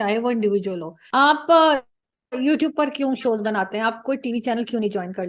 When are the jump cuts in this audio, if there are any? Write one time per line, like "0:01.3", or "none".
0:00.9